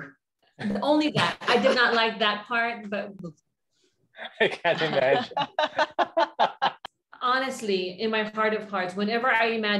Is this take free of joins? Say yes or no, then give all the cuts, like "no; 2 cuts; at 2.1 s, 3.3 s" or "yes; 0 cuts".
no; 2 cuts; at 3.2 s, 6.8 s